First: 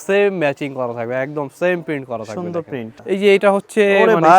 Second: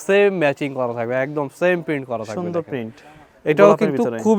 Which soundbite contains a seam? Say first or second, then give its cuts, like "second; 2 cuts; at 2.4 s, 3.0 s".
first; 1 cut; at 2.9 s